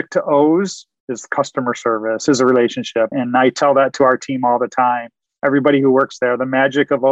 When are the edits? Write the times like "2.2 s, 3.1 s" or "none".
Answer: 3.1 s

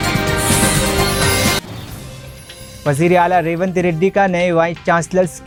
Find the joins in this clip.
none

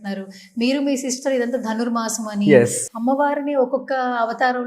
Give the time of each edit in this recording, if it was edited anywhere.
2.8 s

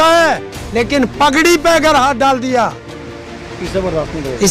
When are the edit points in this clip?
none

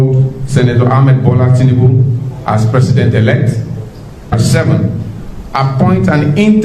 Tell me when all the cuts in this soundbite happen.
4.3 s

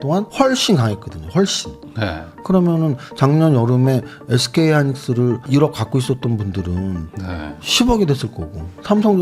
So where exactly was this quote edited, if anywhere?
2.3 s

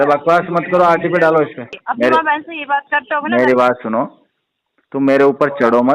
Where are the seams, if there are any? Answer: 1.7 s

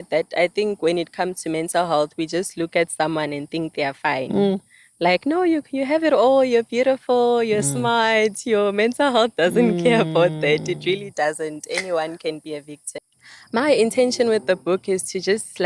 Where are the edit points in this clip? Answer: 12.9 s

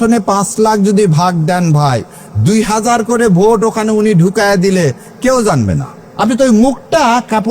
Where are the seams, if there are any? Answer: 6.0 s

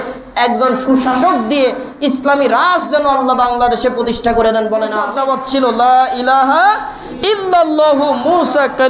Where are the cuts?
5.0 s

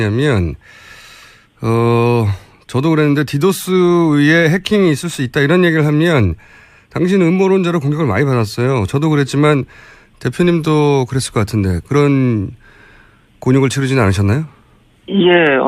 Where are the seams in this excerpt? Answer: 14.3 s

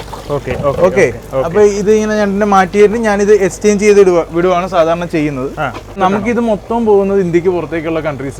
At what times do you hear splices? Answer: 6.0 s

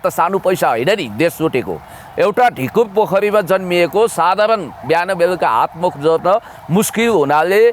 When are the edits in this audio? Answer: none

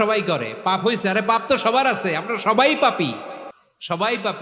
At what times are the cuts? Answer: none

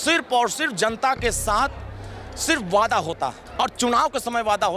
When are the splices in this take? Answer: 3.4 s

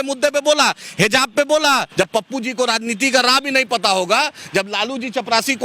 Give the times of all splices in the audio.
1.9 s

